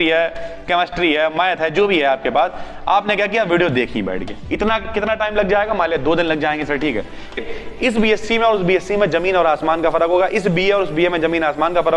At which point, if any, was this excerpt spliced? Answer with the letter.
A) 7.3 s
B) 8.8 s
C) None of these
A